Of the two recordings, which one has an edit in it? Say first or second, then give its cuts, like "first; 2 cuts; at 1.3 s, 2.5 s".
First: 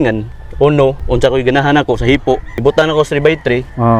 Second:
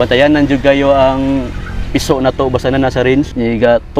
first; 2 cuts; at 1.0 s, 2.5 s